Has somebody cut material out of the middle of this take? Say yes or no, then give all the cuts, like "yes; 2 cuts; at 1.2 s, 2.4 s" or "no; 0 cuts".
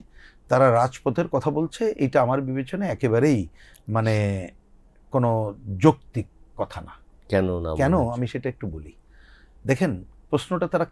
no; 0 cuts